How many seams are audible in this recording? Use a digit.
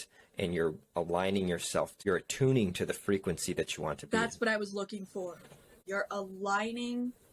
2